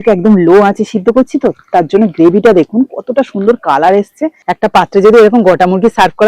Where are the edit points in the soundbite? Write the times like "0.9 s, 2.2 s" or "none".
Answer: 4.4 s

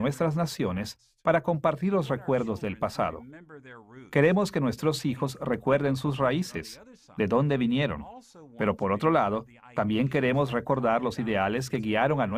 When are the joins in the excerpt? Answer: 6.1 s

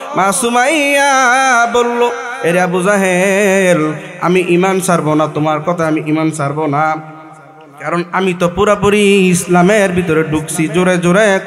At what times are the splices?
none

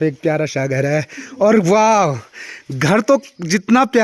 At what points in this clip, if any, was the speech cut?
none

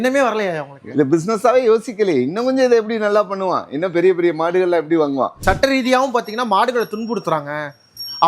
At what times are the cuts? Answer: 5.4 s

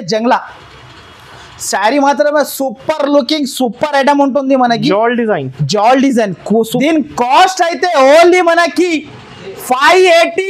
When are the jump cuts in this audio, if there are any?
6.7 s

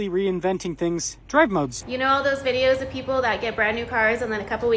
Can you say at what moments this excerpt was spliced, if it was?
1.8 s

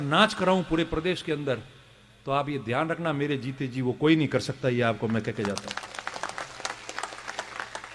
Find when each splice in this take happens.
none

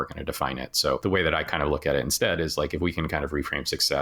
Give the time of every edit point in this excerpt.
1.0 s

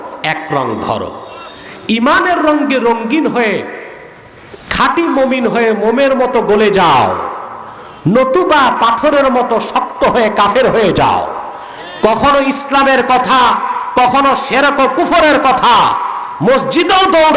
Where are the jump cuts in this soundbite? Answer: none

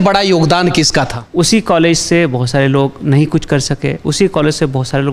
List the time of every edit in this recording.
1.2 s

